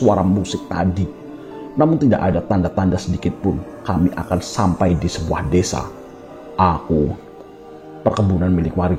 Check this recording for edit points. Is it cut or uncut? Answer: uncut